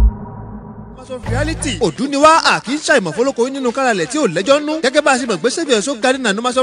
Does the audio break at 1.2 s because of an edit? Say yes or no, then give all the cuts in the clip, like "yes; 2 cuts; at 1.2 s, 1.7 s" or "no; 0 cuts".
yes; 1 cut; at 1.2 s